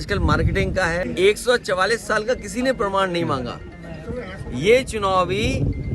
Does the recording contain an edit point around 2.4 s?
no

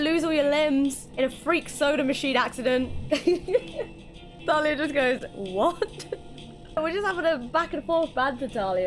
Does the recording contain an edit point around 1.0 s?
yes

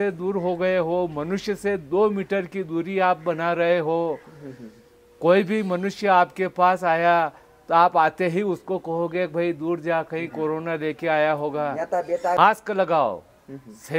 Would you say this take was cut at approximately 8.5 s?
no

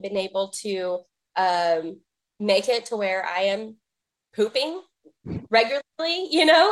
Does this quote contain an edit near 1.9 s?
no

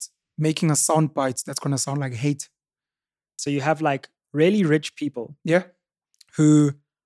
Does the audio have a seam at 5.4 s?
no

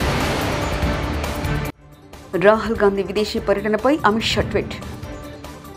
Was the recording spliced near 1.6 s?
no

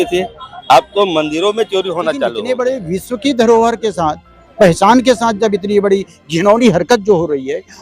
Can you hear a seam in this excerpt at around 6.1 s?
no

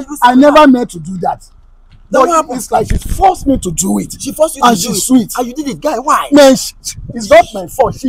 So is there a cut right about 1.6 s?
no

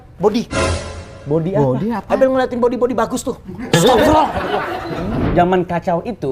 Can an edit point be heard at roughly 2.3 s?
no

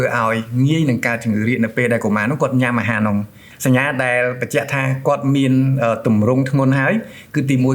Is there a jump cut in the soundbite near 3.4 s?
yes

